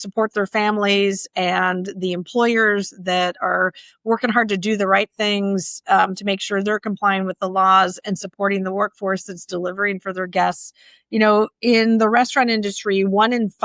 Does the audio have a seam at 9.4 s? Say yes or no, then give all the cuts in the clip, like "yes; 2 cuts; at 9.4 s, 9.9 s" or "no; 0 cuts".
no; 0 cuts